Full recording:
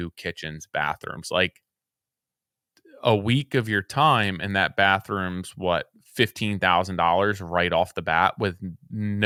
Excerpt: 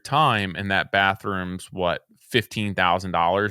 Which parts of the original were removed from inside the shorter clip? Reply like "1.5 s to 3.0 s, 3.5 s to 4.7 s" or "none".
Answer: none